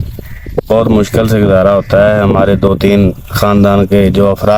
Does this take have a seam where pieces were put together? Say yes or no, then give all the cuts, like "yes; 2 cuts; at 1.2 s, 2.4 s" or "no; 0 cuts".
no; 0 cuts